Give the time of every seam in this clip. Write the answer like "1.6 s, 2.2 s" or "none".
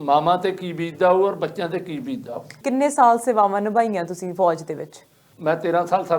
2.6 s, 5.2 s